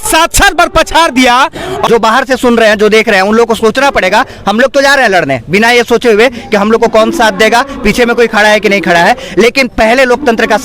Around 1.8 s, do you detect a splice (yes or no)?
yes